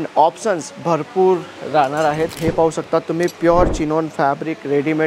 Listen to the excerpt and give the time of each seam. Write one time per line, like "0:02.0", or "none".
0:02.4